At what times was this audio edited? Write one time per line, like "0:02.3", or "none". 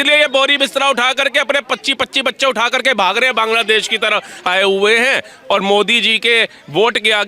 0:04.4